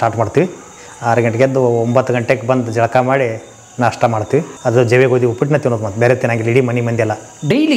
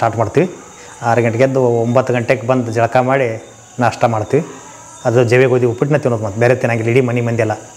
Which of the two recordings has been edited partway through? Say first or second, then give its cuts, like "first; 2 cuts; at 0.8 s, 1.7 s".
first; 1 cut; at 4.5 s